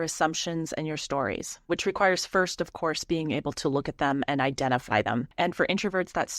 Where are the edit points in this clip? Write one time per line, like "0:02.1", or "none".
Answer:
0:01.7
0:05.3